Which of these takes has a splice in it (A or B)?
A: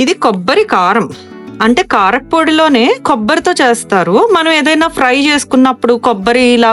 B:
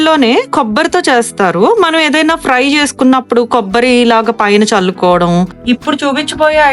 B